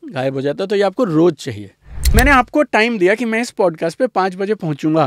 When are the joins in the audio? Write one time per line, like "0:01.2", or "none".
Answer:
0:02.0